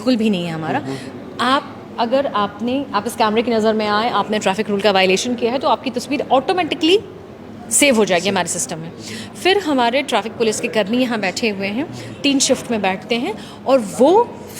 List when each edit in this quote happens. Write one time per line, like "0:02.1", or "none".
none